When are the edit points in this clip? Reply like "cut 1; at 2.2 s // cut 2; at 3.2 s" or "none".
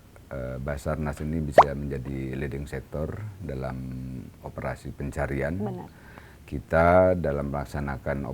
none